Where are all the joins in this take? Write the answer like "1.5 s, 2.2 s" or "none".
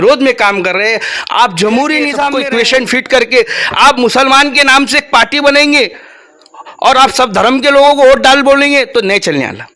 2.4 s